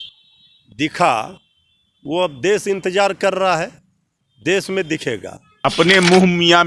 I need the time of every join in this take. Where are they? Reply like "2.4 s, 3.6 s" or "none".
5.5 s